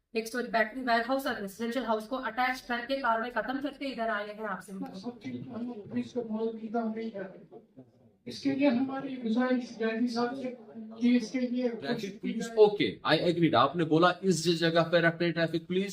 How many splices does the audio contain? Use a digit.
2